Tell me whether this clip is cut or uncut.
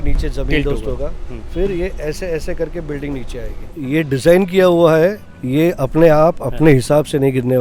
cut